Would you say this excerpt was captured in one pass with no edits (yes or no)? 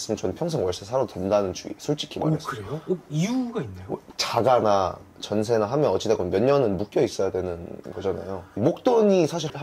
yes